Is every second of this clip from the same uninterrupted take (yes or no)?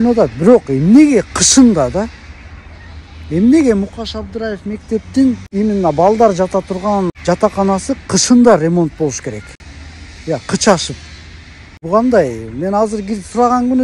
no